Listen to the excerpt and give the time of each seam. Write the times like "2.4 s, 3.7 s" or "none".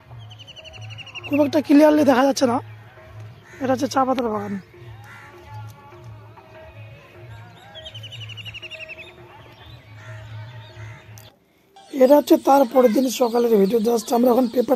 none